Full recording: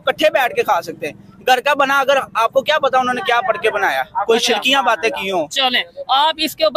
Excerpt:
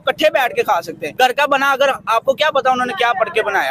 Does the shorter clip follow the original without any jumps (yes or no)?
no